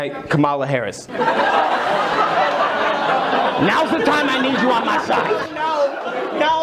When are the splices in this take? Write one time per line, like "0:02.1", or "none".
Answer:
none